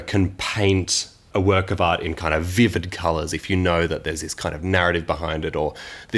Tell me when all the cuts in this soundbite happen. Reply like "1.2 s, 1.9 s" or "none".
1.2 s